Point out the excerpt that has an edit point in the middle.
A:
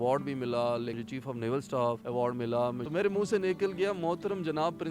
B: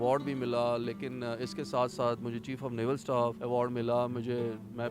A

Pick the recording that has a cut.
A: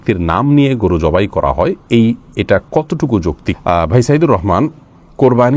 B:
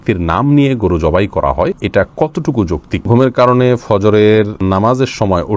B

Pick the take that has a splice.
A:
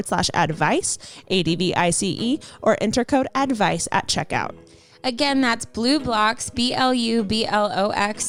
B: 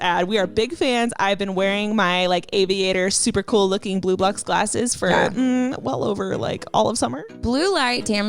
B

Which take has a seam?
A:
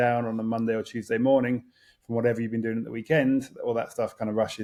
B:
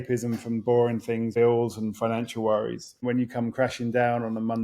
B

